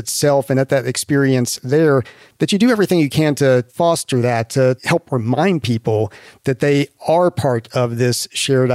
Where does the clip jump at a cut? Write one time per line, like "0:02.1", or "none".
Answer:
0:03.7
0:04.8